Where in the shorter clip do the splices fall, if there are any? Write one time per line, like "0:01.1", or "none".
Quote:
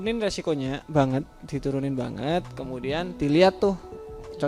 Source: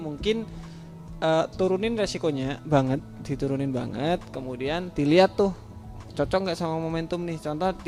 none